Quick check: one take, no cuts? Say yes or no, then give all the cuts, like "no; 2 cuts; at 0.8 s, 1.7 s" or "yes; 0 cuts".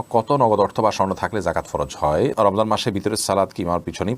no; 1 cut; at 2.3 s